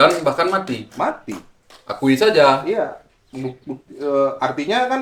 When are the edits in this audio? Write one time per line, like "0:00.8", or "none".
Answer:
none